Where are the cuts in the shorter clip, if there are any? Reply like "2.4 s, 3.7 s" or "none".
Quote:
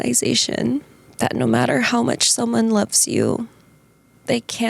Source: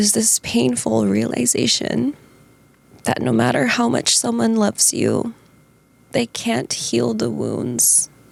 1.0 s